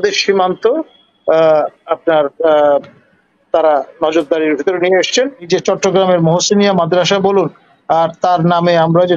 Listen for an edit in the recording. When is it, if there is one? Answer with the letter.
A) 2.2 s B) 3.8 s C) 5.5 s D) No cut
C